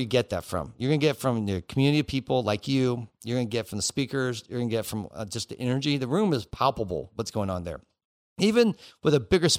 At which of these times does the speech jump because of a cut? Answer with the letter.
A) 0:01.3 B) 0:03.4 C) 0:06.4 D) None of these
D